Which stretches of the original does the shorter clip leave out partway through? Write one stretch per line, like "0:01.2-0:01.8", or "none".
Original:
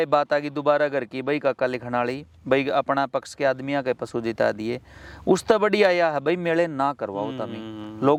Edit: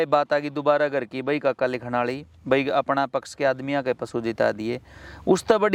none